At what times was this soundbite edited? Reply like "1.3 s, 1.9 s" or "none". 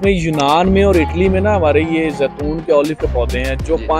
none